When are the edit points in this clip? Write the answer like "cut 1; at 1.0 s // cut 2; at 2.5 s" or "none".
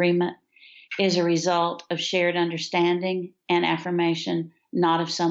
none